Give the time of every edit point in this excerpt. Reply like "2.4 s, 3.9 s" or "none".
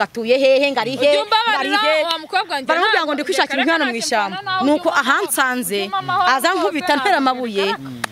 none

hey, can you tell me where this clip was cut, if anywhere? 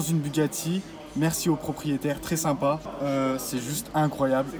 none

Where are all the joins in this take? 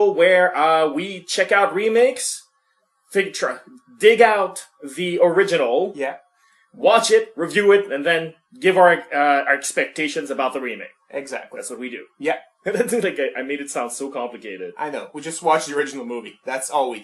none

